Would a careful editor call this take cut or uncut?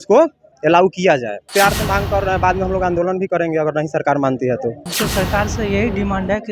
cut